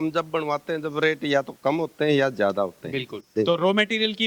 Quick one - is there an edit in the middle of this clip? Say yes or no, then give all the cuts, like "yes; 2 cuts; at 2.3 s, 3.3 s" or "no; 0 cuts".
yes; 1 cut; at 3.3 s